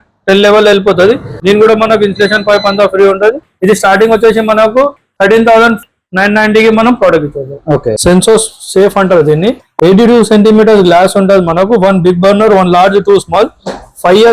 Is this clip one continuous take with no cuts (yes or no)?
no